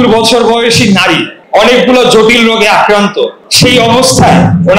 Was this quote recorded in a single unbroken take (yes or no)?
no